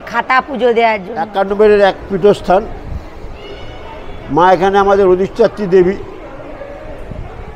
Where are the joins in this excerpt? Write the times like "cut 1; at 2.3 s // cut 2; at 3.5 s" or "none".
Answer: cut 1; at 1.5 s